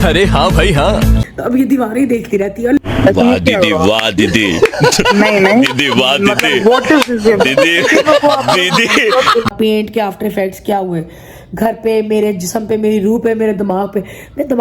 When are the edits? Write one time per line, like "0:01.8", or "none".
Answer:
0:01.2
0:09.5